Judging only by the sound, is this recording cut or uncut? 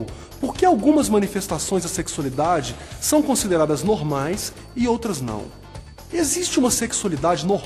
uncut